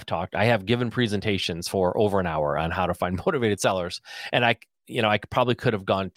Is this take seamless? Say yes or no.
yes